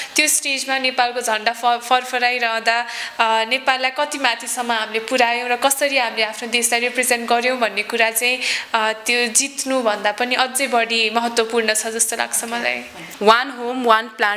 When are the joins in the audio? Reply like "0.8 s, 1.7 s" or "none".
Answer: 13.0 s